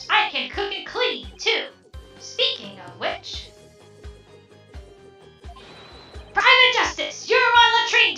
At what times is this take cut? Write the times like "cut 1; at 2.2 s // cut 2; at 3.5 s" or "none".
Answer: none